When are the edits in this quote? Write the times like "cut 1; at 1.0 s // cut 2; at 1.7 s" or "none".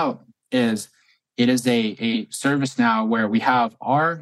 none